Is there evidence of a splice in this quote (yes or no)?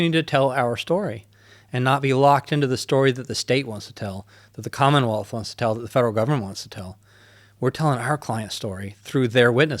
no